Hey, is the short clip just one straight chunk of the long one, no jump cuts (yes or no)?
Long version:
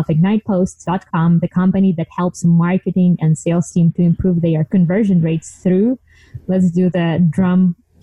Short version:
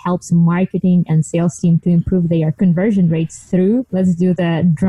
no